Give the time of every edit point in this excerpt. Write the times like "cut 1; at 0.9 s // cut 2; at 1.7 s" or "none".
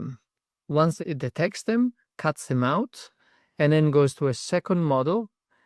cut 1; at 1.0 s